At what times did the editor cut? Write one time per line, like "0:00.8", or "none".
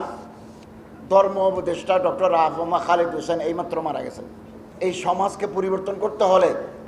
0:04.6